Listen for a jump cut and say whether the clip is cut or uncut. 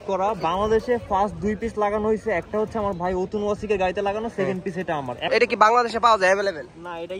cut